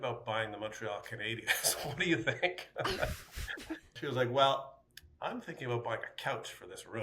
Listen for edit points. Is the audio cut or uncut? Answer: cut